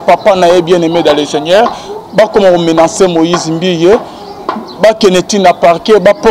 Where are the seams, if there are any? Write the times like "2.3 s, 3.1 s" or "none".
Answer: none